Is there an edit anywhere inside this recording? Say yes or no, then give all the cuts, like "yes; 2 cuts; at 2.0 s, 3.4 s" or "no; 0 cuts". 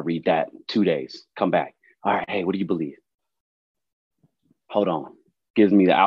no; 0 cuts